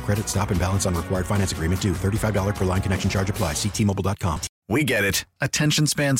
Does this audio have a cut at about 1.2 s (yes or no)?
no